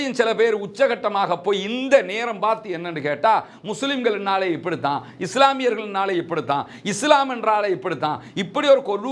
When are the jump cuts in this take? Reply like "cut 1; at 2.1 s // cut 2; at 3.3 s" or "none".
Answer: none